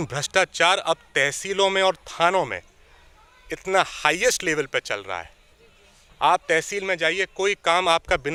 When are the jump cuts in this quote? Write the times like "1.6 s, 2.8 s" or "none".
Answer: none